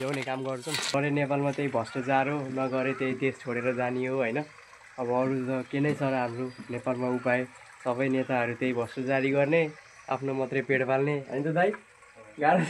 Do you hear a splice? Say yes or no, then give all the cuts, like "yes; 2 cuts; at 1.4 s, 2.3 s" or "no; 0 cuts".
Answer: yes; 1 cut; at 0.9 s